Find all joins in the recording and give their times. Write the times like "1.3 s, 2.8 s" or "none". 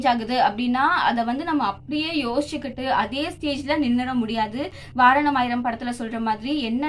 none